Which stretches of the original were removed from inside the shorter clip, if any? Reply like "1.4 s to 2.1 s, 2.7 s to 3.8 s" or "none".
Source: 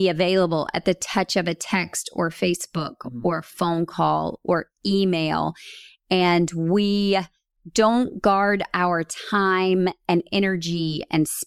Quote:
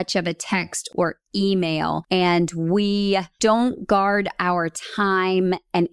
2.1 s to 4.4 s, 5.5 s to 6.0 s, 7.3 s to 7.6 s